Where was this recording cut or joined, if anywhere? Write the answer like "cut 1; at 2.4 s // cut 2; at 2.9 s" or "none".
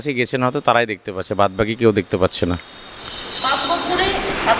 none